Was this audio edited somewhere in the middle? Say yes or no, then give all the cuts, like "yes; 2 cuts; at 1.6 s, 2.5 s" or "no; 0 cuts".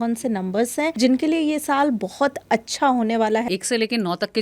yes; 2 cuts; at 0.9 s, 3.5 s